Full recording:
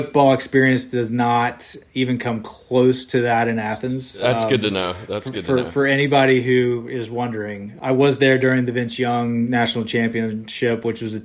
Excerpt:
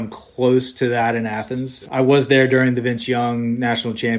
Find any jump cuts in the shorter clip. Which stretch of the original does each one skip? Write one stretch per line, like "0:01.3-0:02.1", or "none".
0:04.0-0:07.6

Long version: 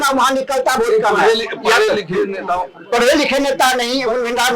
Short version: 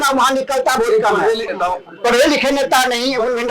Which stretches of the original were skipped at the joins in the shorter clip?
0:01.5-0:02.4

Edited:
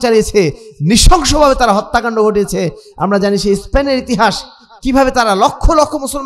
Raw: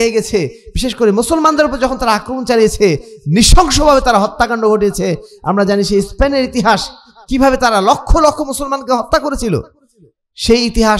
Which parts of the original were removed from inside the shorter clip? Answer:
none

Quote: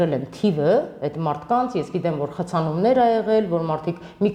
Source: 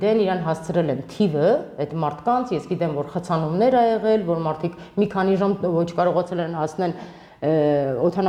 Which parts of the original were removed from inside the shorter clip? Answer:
none

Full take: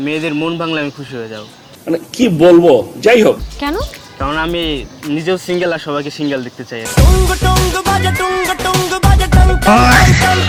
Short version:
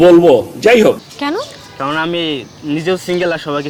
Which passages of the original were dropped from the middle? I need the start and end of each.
none

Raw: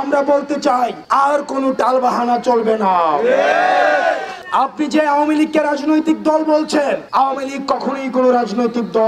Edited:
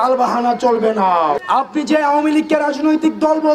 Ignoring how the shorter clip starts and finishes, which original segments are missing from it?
0:03.2-0:04.4

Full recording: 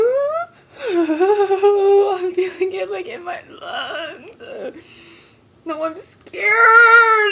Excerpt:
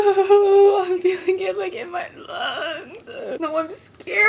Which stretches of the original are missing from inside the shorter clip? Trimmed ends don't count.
0:04.7-0:05.6

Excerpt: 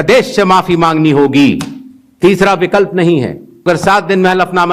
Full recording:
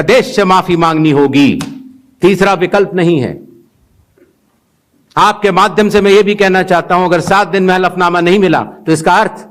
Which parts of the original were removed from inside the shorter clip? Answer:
0:03.6-0:07.1

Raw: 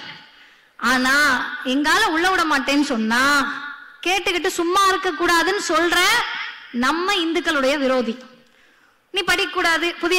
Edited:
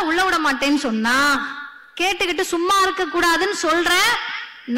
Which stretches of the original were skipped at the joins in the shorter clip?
none

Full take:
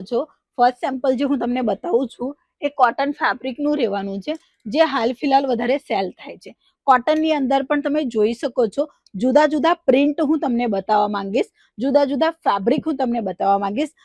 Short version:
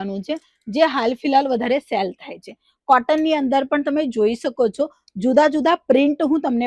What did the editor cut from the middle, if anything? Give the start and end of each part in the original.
none

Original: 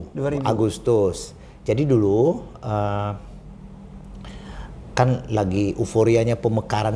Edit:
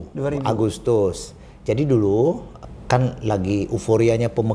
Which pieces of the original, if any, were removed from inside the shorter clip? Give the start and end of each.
0:02.5-0:04.6

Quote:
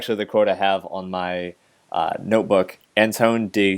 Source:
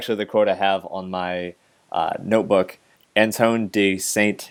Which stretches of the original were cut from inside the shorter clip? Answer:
0:02.8-0:03.0

